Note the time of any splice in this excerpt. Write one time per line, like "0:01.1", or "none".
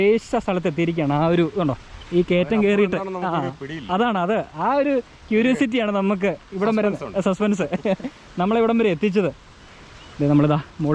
none